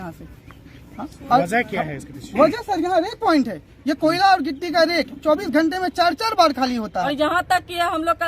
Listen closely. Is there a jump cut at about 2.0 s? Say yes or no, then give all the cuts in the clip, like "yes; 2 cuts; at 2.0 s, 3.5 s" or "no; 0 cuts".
no; 1 cut; at 7.1 s